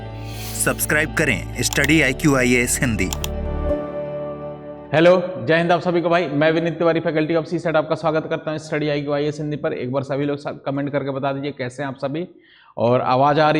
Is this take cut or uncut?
cut